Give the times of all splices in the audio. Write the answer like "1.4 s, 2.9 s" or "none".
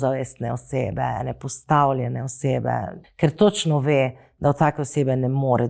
3.0 s